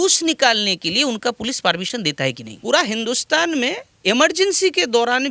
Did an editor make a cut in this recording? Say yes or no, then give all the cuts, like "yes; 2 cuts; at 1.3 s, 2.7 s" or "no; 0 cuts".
yes; 2 cuts; at 2.5 s, 3.9 s